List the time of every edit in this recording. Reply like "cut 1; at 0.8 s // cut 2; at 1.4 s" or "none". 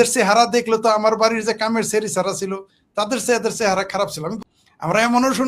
cut 1; at 4.3 s